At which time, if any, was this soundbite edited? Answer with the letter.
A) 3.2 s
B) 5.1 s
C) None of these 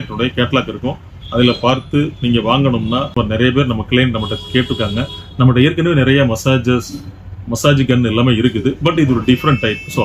A